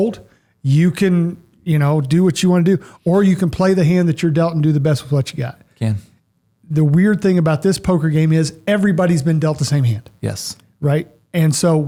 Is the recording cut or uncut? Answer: uncut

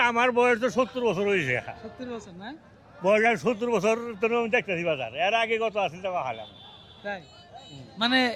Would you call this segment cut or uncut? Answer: uncut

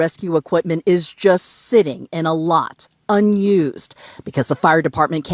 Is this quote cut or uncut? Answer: uncut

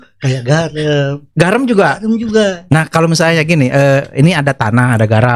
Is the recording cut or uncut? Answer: uncut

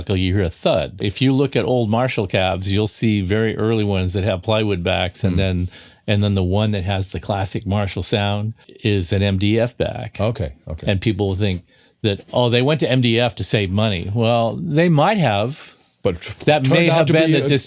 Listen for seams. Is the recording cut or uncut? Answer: cut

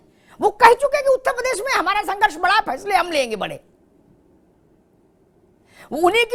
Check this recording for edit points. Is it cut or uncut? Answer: uncut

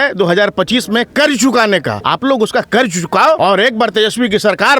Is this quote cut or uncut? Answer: cut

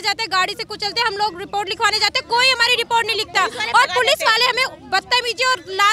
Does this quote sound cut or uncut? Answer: uncut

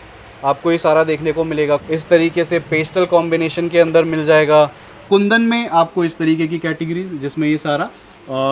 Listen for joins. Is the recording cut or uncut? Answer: cut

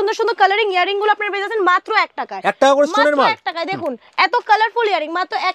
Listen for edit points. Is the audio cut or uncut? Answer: uncut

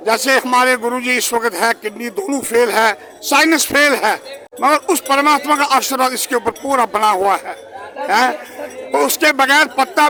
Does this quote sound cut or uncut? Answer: uncut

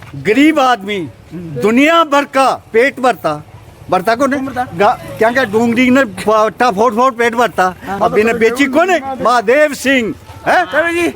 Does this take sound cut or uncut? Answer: cut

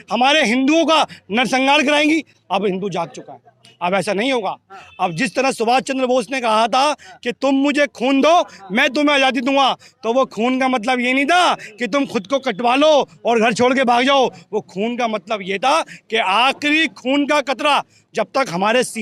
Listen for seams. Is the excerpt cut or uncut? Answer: uncut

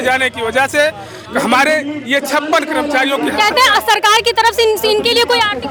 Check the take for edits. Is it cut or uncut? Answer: uncut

